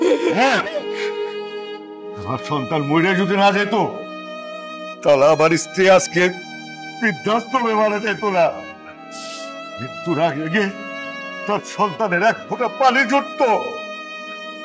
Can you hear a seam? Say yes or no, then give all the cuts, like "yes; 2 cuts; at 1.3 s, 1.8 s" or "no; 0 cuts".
yes; 3 cuts; at 8.5 s, 10.0 s, 13.7 s